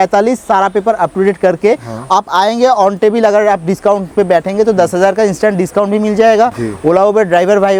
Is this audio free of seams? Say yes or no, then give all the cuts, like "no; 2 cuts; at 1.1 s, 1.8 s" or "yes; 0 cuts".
yes; 0 cuts